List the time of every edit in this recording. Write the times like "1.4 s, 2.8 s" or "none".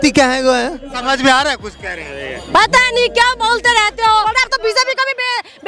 0.9 s, 4.3 s

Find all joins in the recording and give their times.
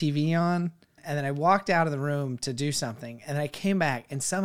1.0 s

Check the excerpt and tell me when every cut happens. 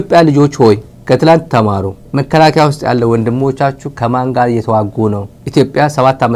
none

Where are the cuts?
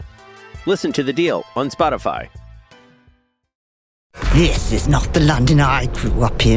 4.0 s

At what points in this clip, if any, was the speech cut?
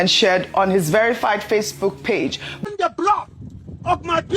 2.5 s

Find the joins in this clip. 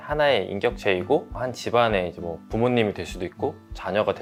none

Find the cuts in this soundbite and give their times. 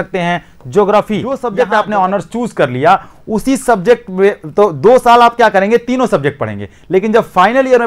1.3 s

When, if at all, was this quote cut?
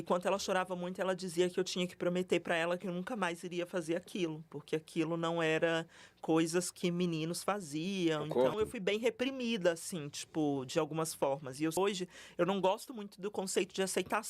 8.5 s, 11.8 s

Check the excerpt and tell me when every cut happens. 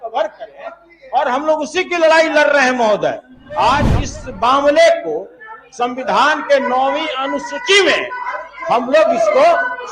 3.9 s

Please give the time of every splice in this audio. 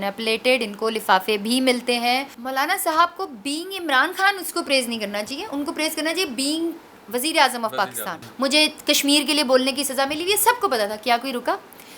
2.4 s, 8.2 s

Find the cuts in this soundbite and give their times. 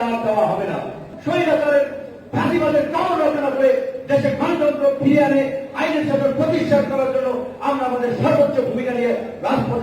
1.1 s

